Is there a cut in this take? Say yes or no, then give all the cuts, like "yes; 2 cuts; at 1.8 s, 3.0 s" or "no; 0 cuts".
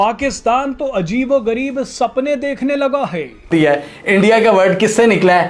yes; 1 cut; at 3.5 s